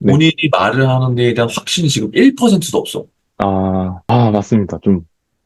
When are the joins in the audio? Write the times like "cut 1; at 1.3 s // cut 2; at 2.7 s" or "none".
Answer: cut 1; at 4.0 s